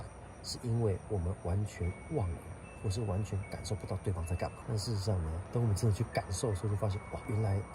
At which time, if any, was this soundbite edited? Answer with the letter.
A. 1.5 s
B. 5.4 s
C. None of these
B